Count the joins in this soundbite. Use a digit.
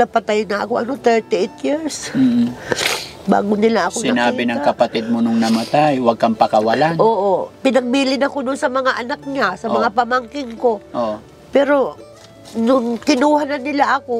0